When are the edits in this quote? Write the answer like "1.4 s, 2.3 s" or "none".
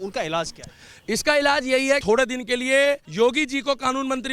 2.0 s, 3.1 s